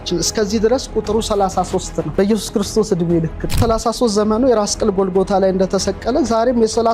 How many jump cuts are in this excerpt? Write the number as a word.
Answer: two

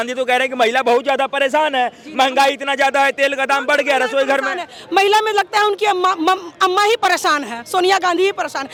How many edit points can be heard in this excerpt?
zero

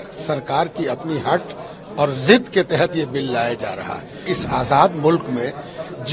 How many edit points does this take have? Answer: one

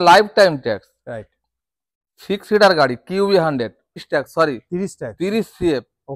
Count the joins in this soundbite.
one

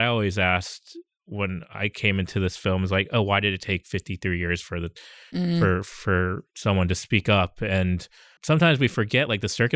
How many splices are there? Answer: two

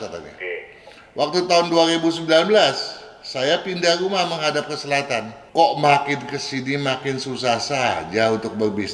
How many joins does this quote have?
one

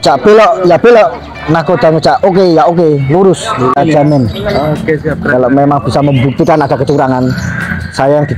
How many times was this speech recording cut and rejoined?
one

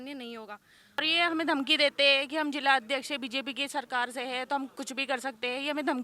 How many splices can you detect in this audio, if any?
one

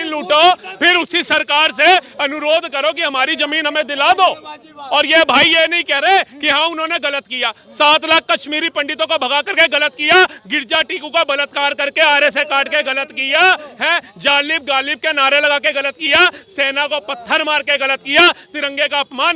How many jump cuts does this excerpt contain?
zero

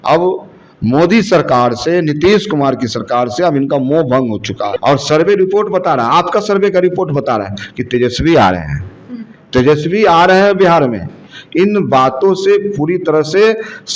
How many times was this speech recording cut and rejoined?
one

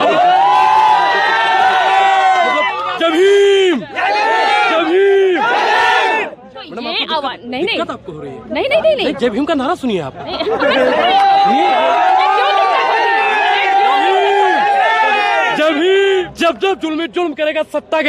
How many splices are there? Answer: one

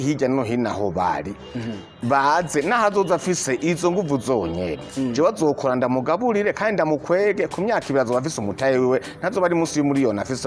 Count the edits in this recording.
zero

